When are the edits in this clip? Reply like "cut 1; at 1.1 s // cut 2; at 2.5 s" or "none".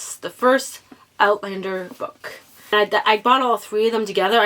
cut 1; at 2.7 s